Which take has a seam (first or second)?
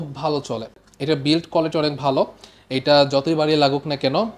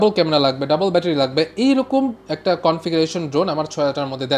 first